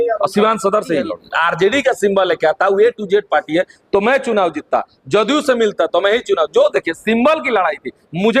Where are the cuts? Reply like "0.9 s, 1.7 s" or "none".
1.2 s